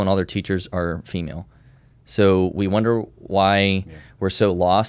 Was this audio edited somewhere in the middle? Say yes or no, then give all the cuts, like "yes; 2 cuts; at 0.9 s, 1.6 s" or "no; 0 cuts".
no; 0 cuts